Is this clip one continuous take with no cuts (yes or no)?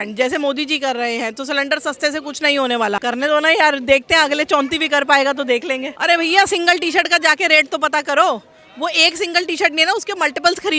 no